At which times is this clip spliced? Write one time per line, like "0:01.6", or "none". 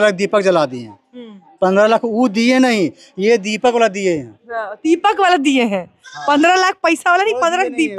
none